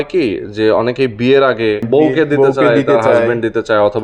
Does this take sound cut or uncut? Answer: cut